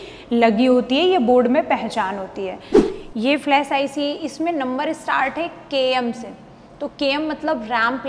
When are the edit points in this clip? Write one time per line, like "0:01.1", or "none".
0:02.8